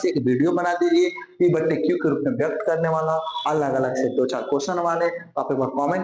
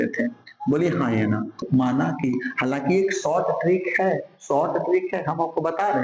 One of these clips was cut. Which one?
second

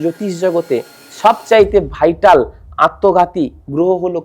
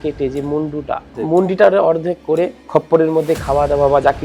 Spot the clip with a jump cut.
second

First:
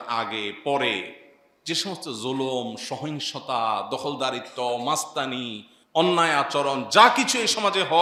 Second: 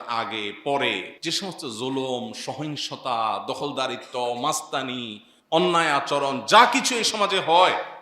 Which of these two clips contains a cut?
second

